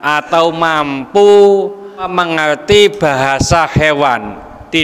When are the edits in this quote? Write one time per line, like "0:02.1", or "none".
0:02.1